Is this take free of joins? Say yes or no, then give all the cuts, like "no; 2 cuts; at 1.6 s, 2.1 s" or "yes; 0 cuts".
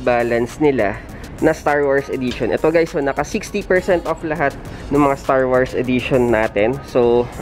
yes; 0 cuts